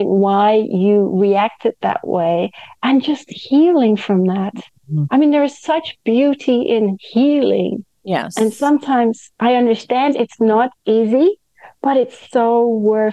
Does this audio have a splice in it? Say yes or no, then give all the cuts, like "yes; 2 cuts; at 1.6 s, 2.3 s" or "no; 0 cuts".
no; 0 cuts